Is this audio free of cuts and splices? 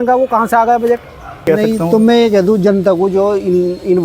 no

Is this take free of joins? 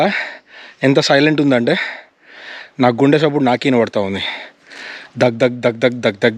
yes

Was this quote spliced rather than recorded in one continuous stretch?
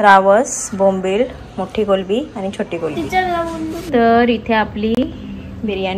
yes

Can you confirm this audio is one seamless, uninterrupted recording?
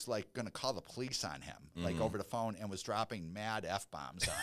yes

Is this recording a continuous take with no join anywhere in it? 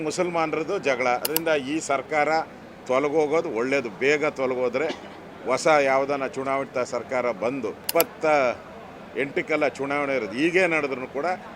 no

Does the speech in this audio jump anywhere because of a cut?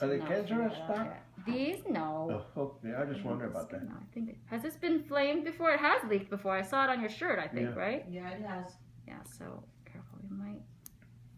yes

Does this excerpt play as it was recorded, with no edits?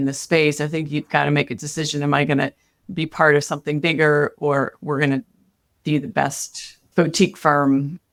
yes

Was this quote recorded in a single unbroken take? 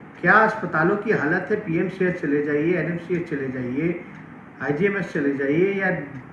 yes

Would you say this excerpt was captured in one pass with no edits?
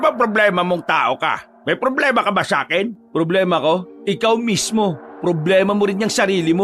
no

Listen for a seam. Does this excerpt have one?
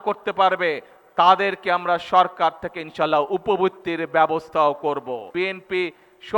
yes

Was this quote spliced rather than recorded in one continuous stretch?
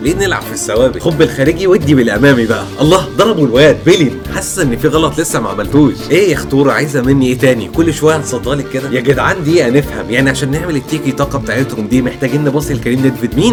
no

